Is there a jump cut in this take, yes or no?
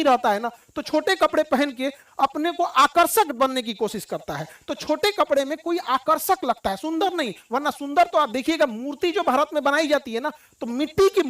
no